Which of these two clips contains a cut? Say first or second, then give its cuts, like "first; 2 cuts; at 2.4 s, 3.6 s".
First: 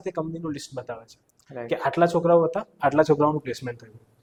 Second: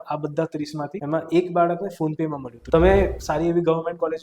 second; 2 cuts; at 1.0 s, 2.5 s